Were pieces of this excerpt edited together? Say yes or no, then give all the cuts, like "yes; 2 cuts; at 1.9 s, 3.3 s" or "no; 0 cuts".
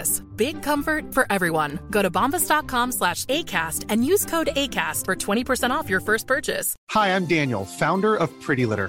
yes; 1 cut; at 6.8 s